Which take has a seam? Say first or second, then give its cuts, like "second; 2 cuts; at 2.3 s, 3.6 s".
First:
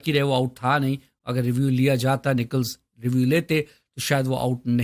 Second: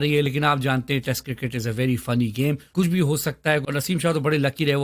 second; 2 cuts; at 2.6 s, 3.6 s